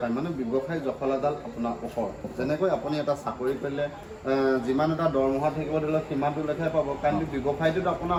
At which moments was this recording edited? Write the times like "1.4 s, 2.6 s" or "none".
none

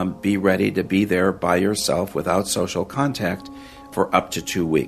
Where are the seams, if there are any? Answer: 3.9 s

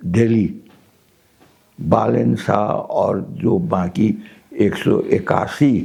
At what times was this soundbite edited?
none

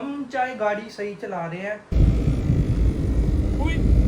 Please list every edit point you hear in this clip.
1.9 s

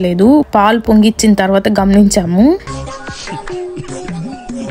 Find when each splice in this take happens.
2.9 s

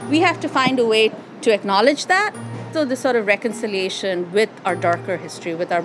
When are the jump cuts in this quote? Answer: 1.3 s, 2.7 s

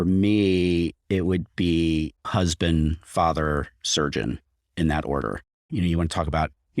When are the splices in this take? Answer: 2.2 s, 5.5 s

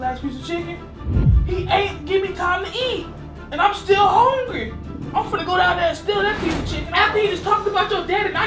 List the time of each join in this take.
6.8 s

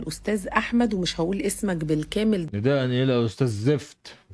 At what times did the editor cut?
2.5 s

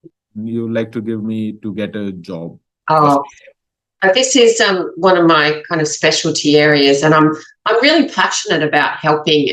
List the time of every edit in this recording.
none

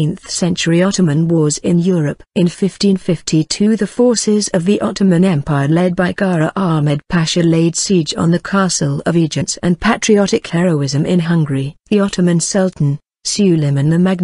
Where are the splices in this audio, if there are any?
none

